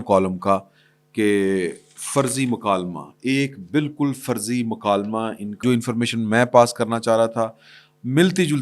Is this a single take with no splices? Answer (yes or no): no